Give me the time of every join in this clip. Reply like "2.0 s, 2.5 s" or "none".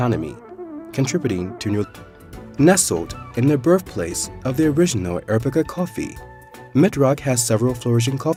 none